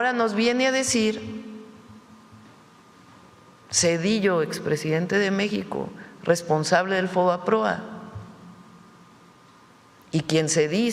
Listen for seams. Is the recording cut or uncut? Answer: uncut